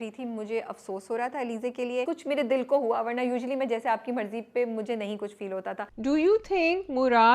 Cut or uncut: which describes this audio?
cut